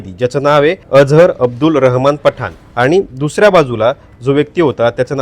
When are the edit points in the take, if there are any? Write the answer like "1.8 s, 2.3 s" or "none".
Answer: 0.8 s, 2.6 s